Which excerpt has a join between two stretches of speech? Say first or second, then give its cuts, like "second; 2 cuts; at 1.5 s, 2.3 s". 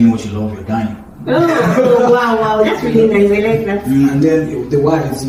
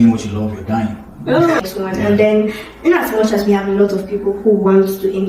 second; 1 cut; at 1.6 s